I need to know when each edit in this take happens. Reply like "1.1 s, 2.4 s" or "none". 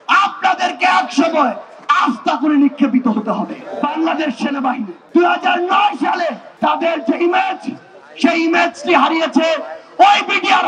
3.6 s, 4.9 s, 6.4 s